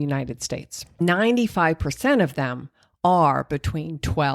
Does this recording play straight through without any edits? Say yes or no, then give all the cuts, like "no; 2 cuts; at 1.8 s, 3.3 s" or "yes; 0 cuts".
no; 1 cut; at 1.0 s